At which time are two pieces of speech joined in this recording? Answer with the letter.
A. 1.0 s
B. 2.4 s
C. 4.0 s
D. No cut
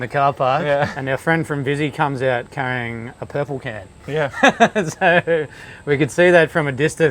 A